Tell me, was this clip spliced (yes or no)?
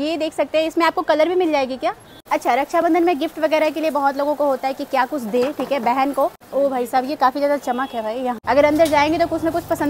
yes